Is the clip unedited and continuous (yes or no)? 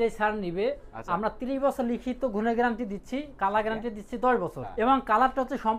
no